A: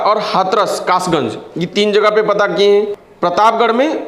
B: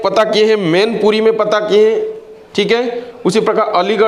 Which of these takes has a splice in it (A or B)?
A